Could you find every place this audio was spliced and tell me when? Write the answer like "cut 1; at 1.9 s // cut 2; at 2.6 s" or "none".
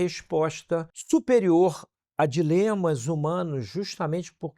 cut 1; at 0.9 s